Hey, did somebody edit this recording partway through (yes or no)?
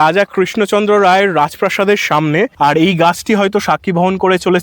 yes